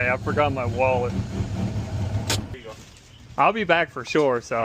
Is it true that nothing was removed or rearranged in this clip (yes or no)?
no